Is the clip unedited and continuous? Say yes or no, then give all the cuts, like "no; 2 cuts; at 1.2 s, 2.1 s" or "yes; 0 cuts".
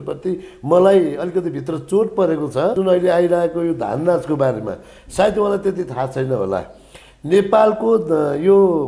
no; 1 cut; at 2.8 s